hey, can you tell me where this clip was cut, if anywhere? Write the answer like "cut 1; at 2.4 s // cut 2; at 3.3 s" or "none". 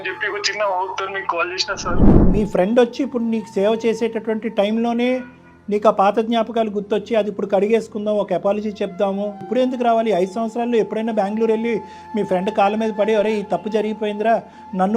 cut 1; at 2.3 s // cut 2; at 9.5 s